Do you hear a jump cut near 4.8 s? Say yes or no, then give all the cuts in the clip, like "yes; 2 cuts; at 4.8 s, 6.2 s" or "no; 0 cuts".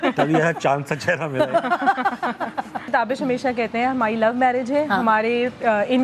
no; 1 cut; at 2.9 s